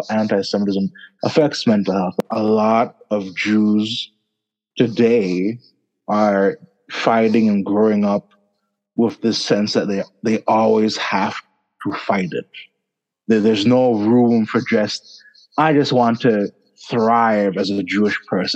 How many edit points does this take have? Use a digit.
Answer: 1